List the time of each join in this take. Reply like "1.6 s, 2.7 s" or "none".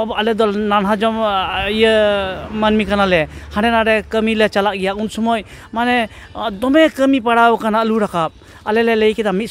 none